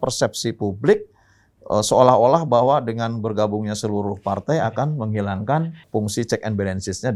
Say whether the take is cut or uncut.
uncut